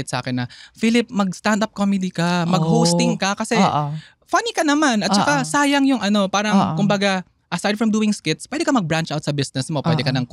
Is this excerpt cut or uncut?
uncut